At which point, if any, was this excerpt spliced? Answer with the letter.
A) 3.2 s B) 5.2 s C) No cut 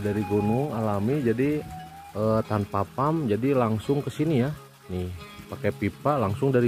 C